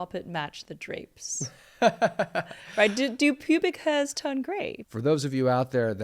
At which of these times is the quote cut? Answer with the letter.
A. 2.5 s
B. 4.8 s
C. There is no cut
B